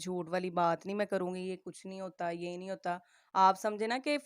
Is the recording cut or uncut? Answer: uncut